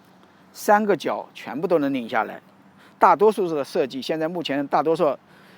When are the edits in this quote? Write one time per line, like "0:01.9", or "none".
none